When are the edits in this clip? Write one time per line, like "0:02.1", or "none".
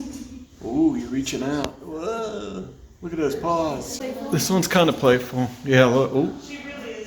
0:03.9

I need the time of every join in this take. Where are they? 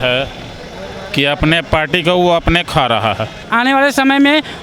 0:03.4

